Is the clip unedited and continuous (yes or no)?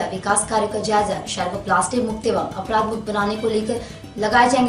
yes